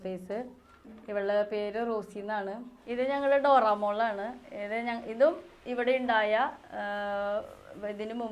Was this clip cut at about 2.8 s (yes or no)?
yes